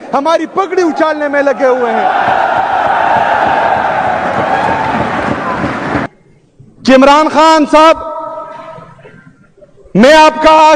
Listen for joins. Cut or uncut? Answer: cut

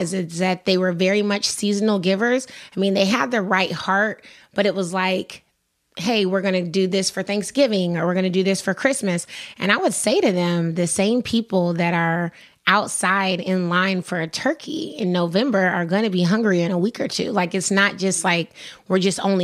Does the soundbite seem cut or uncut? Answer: uncut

